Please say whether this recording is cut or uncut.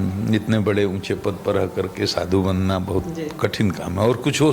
uncut